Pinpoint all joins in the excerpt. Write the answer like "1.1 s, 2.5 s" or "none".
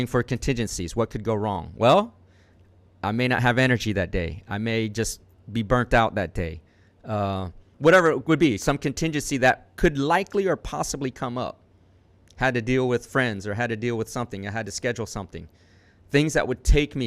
7.7 s